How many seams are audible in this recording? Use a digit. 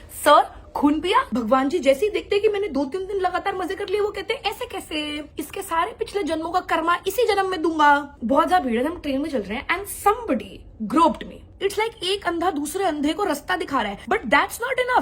4